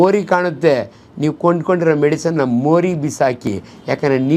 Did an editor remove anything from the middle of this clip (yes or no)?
no